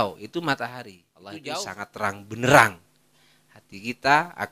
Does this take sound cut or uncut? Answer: cut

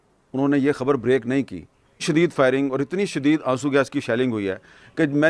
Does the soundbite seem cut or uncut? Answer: cut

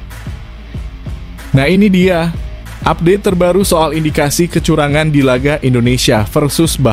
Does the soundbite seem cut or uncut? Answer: cut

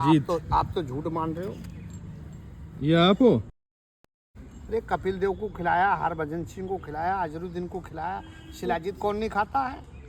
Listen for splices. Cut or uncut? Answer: cut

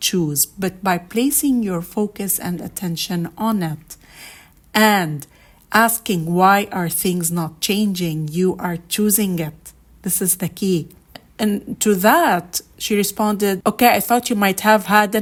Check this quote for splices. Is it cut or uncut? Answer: uncut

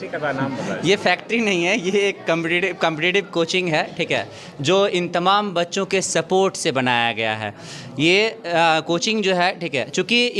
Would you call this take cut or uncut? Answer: uncut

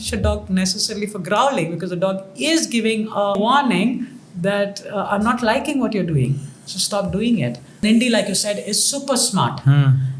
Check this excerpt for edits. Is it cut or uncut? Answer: cut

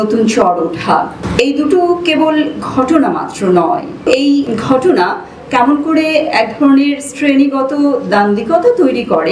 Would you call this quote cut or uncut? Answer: cut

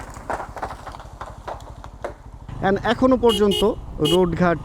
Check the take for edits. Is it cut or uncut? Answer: cut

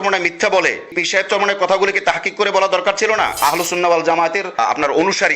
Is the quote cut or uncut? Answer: cut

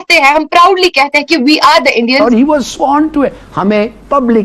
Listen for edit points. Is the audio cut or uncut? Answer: cut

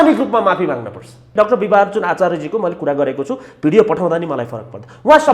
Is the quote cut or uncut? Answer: cut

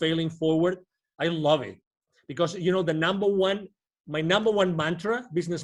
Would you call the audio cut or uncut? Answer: uncut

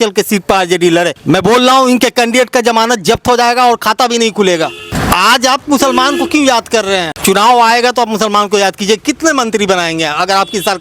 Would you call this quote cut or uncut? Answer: cut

